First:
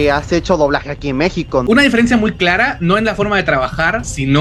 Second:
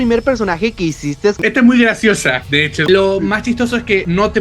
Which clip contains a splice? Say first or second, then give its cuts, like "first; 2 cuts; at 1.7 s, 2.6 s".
second; 2 cuts; at 1.4 s, 2.8 s